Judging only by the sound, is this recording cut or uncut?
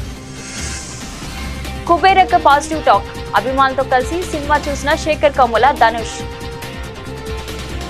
uncut